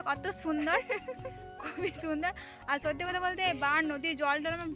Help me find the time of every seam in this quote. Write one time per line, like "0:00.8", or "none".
none